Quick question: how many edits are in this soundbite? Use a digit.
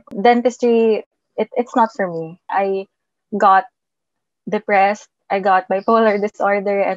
1